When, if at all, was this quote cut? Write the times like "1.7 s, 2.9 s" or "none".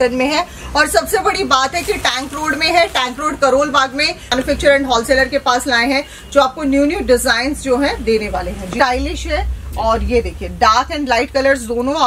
4.3 s, 8.8 s